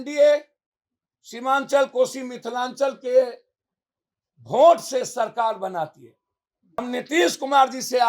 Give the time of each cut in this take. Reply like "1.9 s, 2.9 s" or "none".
6.8 s